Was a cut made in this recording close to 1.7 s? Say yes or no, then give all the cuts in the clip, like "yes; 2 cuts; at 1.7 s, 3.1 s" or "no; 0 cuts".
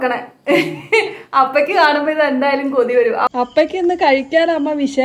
no; 1 cut; at 3.3 s